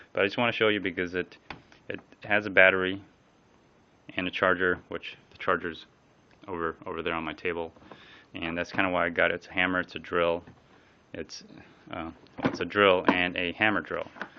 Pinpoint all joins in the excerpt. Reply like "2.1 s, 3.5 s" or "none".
8.3 s